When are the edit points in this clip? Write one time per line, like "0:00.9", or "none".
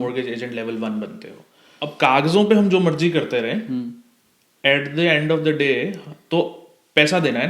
0:01.6